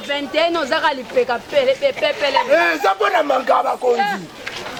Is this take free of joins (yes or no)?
yes